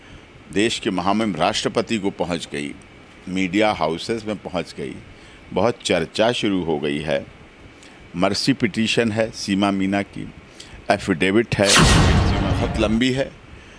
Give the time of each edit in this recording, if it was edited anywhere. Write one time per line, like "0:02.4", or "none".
0:12.2